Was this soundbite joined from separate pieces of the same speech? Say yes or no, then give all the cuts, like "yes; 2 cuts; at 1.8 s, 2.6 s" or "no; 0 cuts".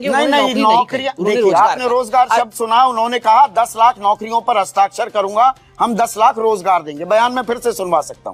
no; 0 cuts